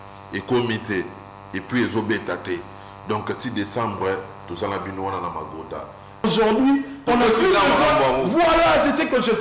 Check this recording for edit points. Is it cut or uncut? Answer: cut